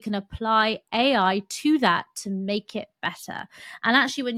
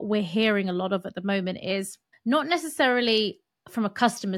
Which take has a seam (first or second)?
second